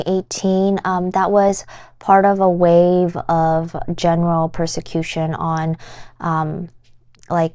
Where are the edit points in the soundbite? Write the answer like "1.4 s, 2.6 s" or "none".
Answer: none